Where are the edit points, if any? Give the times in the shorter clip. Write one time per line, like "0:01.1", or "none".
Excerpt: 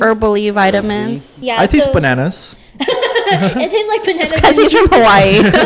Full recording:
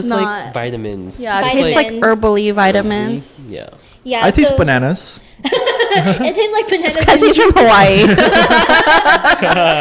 0:01.3